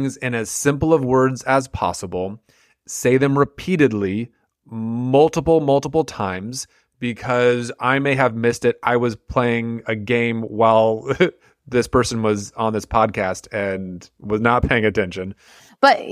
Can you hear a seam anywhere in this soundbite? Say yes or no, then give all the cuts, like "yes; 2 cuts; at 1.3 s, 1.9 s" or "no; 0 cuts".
no; 0 cuts